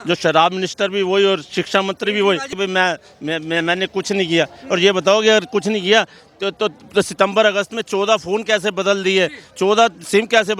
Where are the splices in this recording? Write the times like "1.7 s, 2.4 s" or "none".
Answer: 2.5 s